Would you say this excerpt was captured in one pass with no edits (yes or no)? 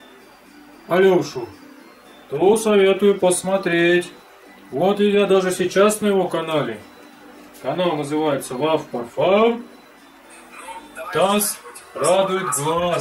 yes